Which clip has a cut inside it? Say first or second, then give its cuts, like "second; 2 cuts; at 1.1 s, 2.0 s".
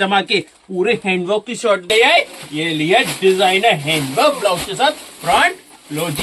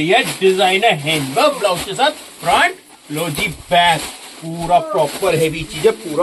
first; 1 cut; at 1.9 s